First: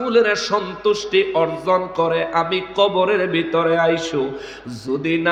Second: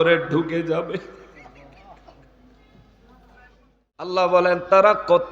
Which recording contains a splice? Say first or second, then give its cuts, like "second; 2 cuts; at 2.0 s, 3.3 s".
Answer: second; 1 cut; at 4.1 s